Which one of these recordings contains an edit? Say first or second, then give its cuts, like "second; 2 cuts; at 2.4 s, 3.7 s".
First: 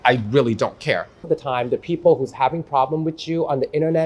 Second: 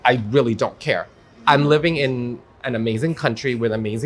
first; 1 cut; at 1.3 s